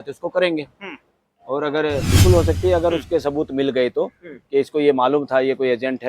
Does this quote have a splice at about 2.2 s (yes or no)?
yes